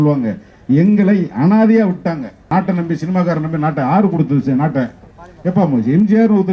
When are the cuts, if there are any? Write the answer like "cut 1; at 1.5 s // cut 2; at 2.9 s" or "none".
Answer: cut 1; at 2.5 s